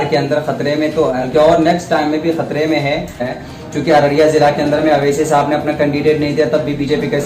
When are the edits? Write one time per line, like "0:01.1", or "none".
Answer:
0:01.2
0:03.4